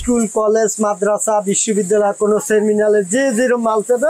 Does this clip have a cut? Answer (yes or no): no